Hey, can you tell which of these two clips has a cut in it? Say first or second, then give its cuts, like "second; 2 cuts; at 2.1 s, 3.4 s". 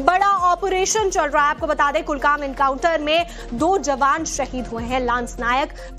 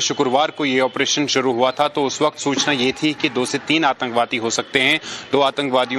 first; 1 cut; at 0.9 s